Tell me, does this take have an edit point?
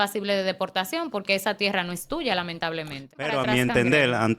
yes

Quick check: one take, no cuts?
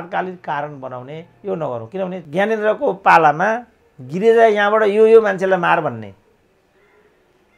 no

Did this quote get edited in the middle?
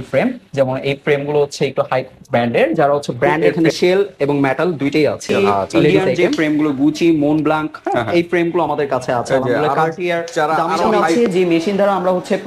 yes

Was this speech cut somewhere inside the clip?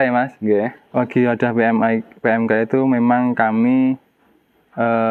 no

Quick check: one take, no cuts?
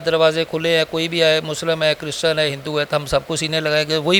yes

